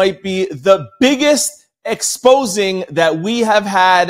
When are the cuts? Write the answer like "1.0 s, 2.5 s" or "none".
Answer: none